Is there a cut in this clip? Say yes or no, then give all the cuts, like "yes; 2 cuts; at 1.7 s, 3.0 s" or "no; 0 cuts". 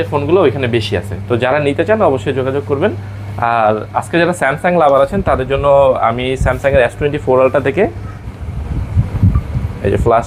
yes; 1 cut; at 8.1 s